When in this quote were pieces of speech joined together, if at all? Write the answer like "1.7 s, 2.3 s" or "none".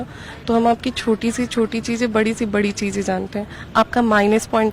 none